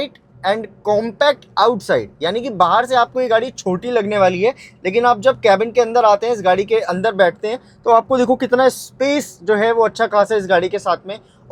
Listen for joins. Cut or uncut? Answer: uncut